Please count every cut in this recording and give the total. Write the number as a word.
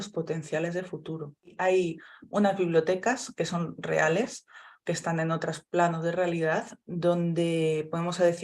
one